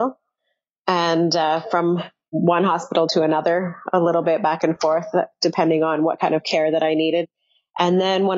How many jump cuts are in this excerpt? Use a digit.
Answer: 0